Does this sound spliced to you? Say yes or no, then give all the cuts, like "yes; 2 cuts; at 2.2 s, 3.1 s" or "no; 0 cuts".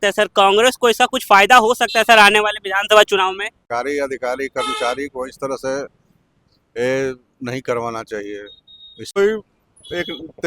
yes; 2 cuts; at 3.7 s, 9.2 s